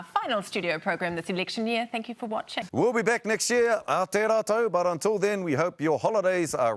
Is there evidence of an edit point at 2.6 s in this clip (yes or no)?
yes